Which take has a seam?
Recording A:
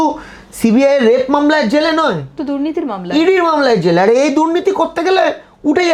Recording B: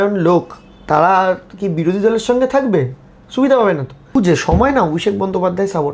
B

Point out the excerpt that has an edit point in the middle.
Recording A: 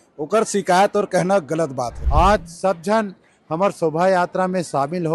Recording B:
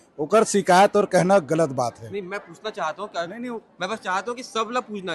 A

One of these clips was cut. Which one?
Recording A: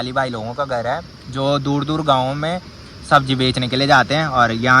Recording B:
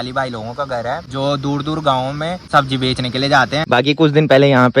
B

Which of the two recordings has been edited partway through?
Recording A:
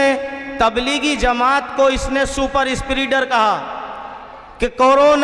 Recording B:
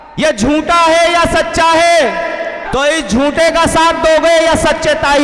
B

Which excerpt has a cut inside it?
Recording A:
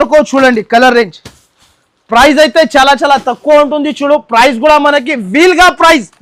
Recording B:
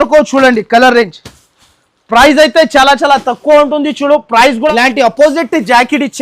B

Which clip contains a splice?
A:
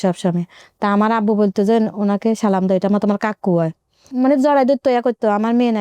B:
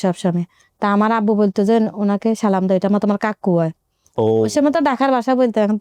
A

